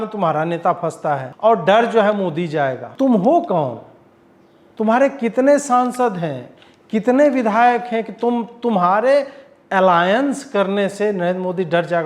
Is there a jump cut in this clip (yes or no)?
yes